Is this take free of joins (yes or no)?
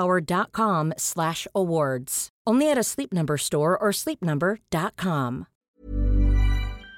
no